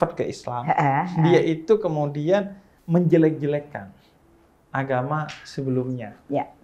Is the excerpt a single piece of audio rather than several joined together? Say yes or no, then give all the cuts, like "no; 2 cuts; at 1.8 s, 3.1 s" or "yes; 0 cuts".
yes; 0 cuts